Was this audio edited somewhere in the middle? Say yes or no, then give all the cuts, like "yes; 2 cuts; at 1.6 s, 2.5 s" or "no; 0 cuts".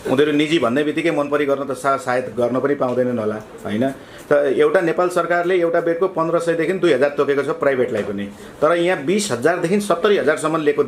no; 0 cuts